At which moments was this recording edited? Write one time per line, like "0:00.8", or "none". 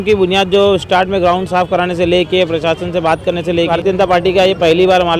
0:03.7